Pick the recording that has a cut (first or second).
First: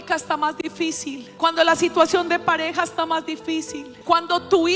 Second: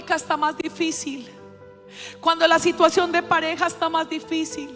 first